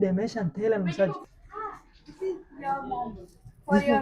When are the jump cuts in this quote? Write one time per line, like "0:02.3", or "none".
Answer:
0:01.2